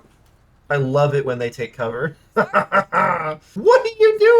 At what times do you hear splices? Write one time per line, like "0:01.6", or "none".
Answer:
0:03.5